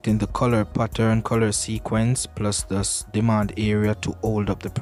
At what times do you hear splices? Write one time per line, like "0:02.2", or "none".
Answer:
none